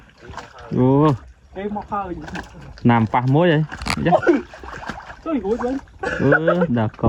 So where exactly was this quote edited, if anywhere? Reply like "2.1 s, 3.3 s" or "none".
none